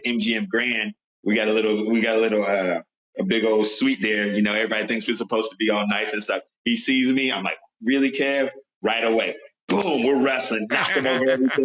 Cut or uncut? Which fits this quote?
uncut